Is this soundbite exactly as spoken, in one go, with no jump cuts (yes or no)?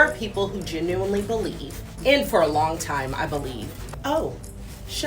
no